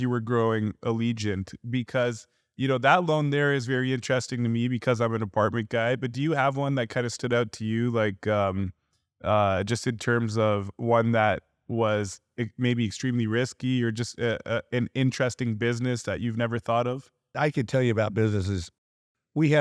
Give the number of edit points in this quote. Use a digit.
0